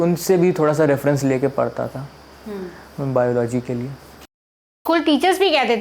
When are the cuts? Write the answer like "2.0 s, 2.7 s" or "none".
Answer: 4.8 s

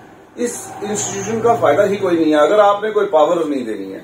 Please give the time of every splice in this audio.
none

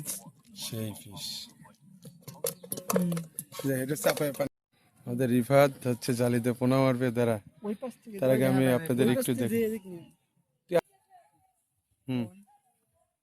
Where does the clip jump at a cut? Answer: 4.5 s, 10.8 s

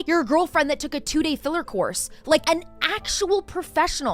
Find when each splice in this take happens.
none

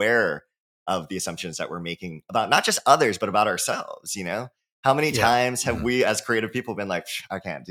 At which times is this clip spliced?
none

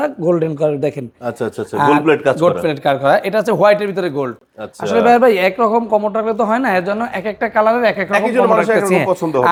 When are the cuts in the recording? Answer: none

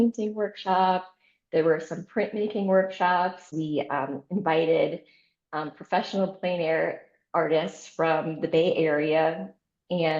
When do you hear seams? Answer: 3.5 s

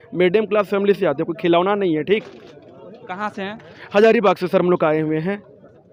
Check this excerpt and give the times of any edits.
none

